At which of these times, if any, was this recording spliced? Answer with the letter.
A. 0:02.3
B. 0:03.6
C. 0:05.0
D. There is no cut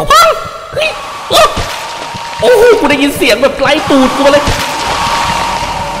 C